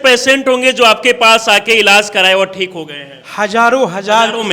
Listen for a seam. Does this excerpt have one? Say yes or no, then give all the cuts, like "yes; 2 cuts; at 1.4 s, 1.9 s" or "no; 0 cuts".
no; 0 cuts